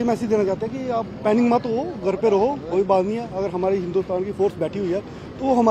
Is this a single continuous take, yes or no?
yes